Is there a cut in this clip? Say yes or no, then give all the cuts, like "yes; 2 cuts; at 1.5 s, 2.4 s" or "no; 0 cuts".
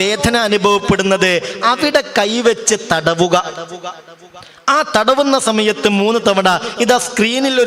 no; 0 cuts